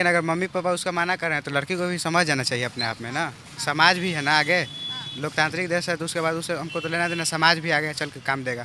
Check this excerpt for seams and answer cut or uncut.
uncut